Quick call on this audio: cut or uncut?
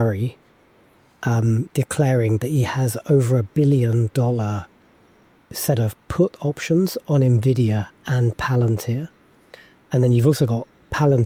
uncut